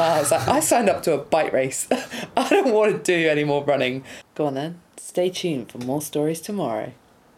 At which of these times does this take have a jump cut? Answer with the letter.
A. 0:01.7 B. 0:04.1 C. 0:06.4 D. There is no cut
B